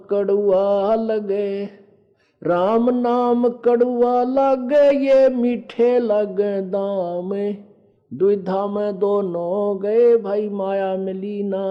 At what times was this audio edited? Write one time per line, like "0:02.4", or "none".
none

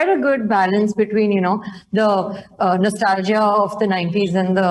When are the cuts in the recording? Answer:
none

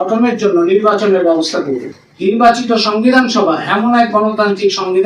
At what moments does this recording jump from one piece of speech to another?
0:01.9

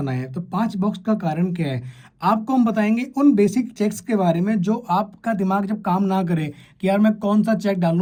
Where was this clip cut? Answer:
none

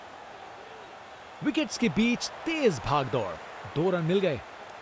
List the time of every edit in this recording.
0:01.4

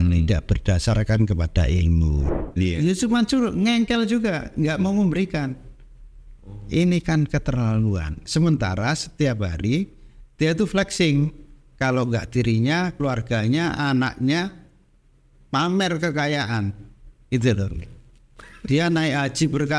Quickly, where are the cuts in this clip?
0:02.6

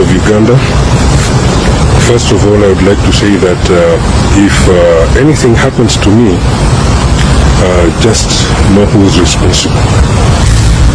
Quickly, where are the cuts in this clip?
none

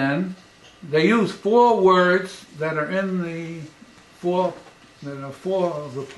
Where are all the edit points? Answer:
0:01.8

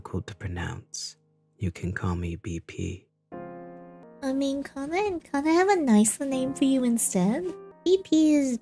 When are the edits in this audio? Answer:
none

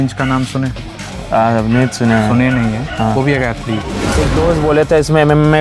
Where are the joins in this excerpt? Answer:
0:04.0

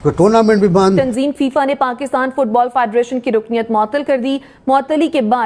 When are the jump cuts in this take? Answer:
0:01.0

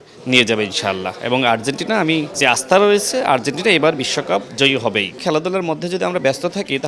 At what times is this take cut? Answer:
0:02.4
0:05.2

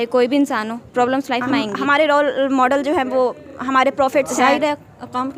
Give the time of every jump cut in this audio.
0:01.4
0:04.3

